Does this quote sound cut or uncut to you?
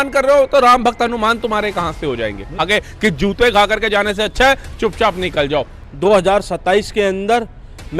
cut